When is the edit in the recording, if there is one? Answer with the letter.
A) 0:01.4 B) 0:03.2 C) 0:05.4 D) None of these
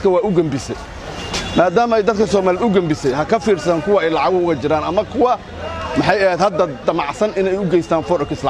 D